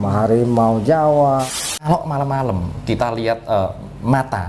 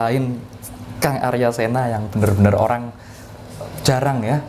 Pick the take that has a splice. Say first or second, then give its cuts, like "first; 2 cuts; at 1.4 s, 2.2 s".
first; 1 cut; at 1.5 s